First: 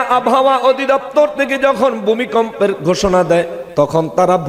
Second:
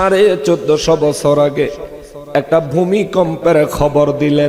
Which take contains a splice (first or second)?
first